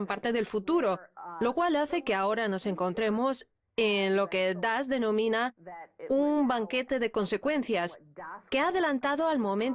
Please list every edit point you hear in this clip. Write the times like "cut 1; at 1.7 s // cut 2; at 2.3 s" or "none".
cut 1; at 7.9 s